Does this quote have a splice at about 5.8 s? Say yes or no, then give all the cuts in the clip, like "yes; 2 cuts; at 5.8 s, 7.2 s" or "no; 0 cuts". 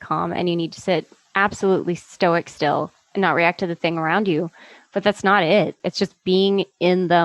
yes; 1 cut; at 5.8 s